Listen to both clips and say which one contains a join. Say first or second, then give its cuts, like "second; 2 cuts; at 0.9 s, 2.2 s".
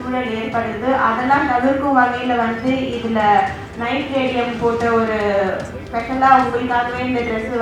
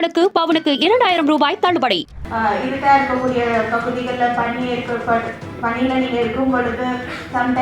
second; 1 cut; at 2.1 s